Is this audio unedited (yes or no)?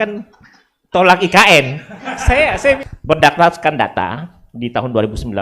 no